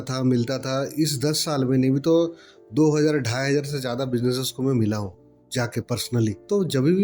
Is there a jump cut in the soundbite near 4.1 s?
no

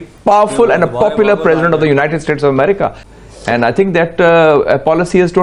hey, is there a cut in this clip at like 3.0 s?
yes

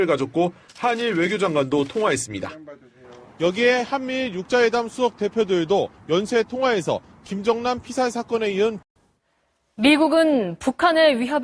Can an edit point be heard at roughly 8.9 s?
yes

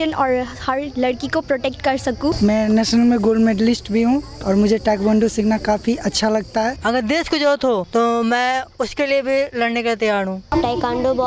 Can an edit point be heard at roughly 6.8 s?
yes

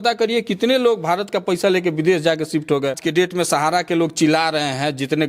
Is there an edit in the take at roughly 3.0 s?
yes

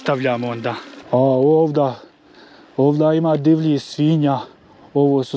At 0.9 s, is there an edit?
yes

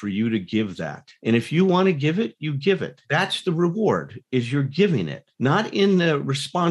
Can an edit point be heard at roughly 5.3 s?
no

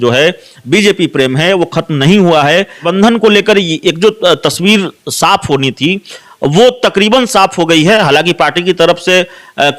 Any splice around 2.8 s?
yes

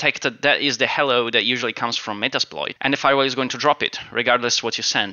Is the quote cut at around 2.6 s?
yes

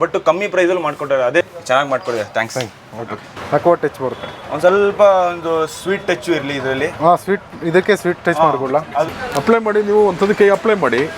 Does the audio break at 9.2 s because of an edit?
yes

